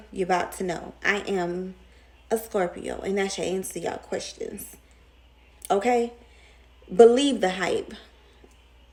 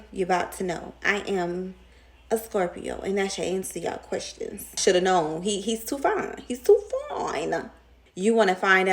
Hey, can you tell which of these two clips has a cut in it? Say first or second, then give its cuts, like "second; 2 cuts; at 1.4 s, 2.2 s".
second; 2 cuts; at 4.7 s, 7.9 s